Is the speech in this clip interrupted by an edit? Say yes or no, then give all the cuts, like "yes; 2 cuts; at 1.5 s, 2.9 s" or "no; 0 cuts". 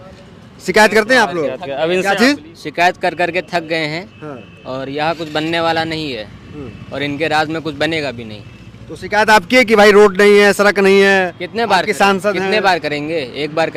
no; 0 cuts